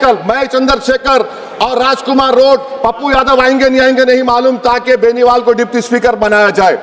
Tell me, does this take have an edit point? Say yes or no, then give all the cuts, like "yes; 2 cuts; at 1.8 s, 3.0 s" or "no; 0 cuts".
no; 0 cuts